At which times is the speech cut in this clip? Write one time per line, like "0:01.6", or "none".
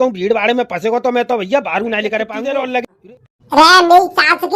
0:02.9